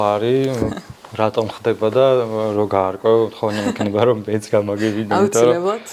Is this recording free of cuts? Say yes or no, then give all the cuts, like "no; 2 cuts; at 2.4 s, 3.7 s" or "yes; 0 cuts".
yes; 0 cuts